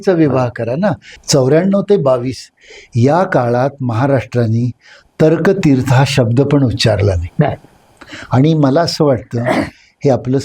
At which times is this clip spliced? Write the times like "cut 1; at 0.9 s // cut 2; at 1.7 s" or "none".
cut 1; at 1.1 s